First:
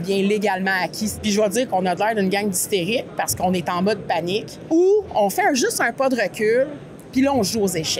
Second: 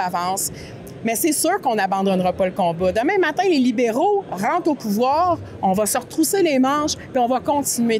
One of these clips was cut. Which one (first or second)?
first